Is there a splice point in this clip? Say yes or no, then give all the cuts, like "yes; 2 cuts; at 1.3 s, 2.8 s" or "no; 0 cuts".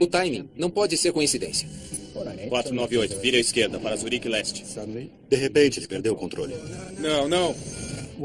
no; 0 cuts